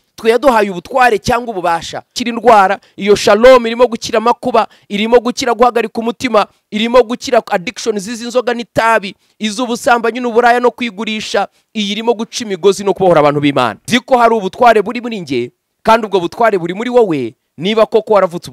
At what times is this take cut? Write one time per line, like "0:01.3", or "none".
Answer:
0:02.2
0:13.8